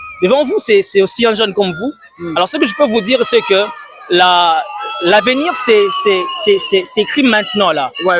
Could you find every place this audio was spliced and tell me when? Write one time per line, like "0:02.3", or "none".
none